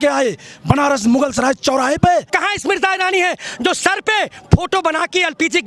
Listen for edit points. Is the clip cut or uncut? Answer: cut